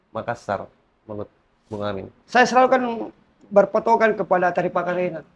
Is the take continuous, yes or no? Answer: no